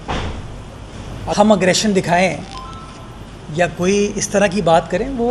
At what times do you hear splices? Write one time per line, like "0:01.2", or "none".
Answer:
0:01.3